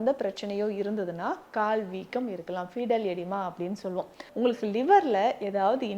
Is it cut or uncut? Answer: cut